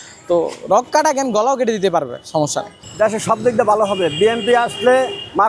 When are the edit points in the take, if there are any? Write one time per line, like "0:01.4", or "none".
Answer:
0:02.8